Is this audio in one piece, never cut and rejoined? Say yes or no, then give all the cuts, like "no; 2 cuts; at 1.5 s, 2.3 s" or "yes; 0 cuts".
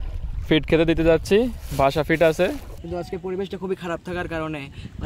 no; 1 cut; at 2.7 s